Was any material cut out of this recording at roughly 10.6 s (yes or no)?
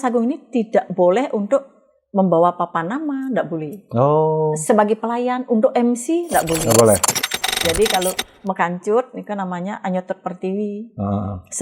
no